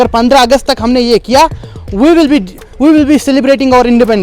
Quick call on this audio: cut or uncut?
uncut